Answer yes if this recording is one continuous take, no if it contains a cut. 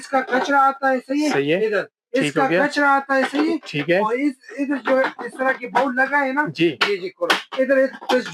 yes